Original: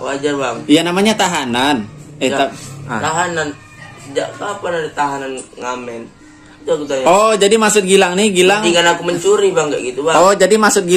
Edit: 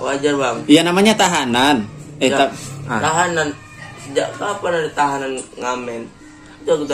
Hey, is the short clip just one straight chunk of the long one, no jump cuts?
yes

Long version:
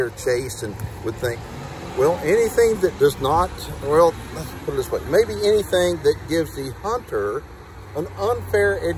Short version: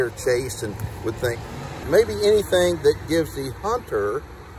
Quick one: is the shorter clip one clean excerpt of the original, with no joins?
no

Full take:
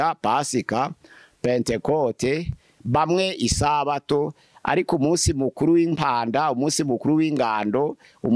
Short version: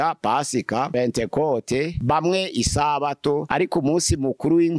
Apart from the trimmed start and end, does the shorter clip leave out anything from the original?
yes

